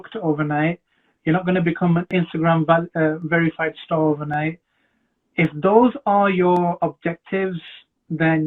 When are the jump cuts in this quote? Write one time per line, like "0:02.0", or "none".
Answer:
none

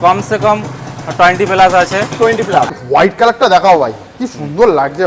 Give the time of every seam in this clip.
0:02.7

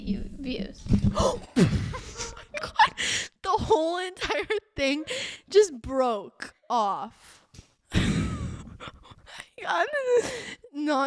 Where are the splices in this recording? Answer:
none

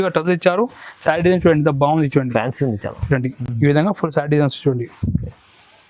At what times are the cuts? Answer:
none

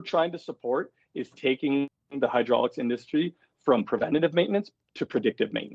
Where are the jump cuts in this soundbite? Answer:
none

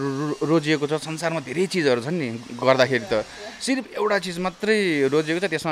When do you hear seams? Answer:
none

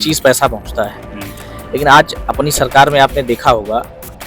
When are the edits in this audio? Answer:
none

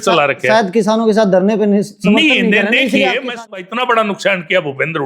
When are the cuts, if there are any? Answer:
0:03.4

